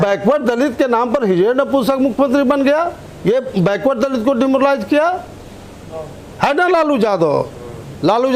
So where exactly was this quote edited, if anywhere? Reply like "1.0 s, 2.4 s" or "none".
none